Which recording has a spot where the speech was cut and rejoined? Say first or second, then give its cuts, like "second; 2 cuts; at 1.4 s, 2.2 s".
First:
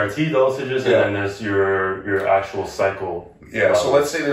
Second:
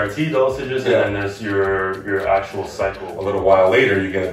second; 1 cut; at 3.1 s